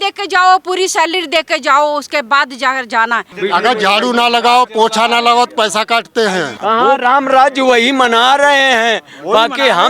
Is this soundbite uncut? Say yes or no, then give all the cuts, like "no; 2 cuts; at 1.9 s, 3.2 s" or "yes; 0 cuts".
no; 2 cuts; at 3.3 s, 6.5 s